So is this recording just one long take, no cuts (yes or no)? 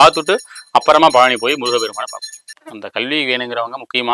no